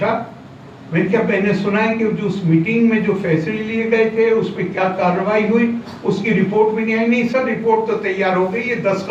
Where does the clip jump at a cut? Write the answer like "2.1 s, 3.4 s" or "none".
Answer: none